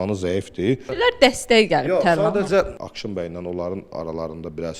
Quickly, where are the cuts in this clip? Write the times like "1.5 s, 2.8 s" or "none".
0.9 s, 2.8 s